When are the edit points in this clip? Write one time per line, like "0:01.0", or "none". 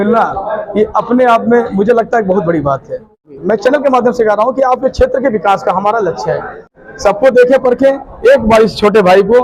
0:03.4
0:06.7